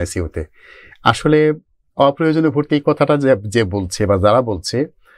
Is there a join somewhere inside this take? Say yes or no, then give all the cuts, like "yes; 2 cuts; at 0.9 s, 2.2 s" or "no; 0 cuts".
no; 0 cuts